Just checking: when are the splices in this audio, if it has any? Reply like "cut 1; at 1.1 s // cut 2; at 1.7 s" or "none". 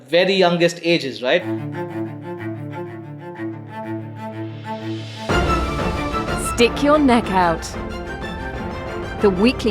cut 1; at 1.5 s